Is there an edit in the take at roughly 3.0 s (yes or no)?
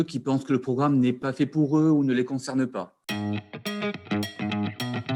yes